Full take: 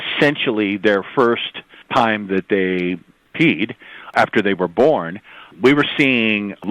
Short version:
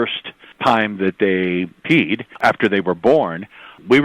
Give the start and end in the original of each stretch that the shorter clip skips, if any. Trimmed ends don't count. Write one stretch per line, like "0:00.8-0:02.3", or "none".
0:03.2-0:03.7